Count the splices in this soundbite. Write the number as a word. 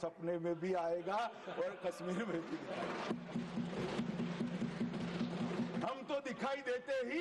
zero